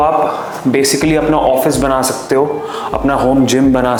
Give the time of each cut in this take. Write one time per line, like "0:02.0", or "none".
none

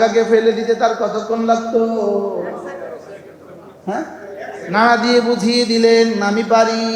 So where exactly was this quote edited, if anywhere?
none

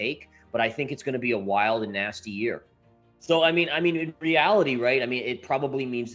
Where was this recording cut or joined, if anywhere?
0:03.2

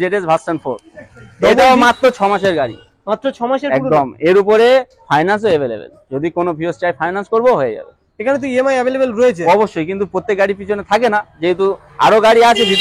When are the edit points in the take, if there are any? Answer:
none

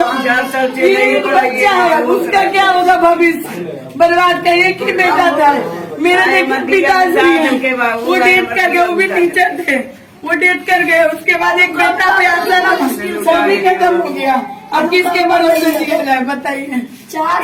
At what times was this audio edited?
none

